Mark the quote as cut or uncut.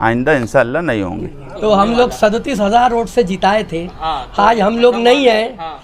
cut